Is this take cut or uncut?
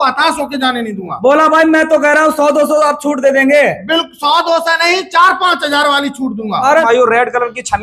cut